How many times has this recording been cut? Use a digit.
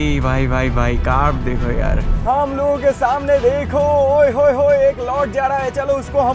1